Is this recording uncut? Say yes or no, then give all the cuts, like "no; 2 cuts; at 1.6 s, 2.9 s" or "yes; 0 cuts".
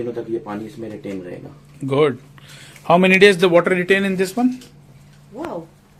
yes; 0 cuts